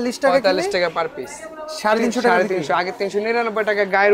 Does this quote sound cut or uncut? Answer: uncut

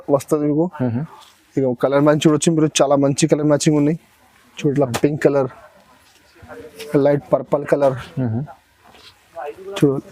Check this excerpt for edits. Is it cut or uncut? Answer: uncut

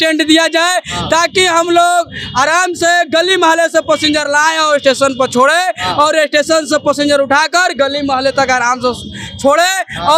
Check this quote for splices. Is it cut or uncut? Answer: uncut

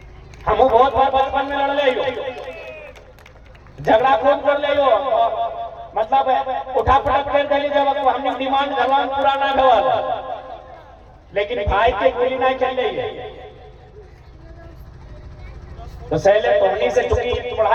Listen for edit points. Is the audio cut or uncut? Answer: uncut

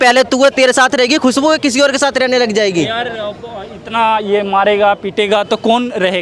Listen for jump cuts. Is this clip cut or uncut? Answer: uncut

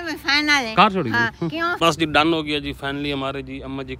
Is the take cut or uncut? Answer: cut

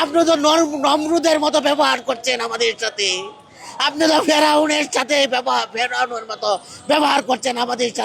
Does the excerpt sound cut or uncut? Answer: uncut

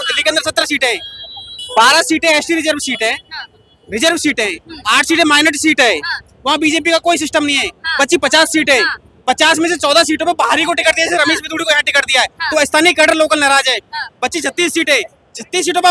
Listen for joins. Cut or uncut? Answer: uncut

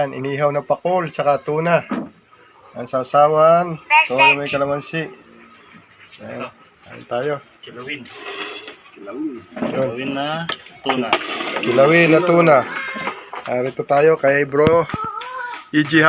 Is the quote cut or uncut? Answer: uncut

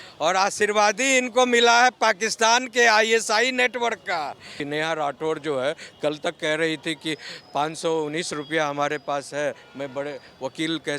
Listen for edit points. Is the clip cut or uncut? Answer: cut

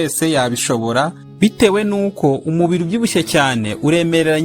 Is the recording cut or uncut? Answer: cut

